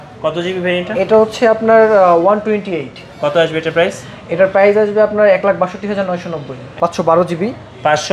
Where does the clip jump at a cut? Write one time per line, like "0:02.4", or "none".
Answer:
0:06.6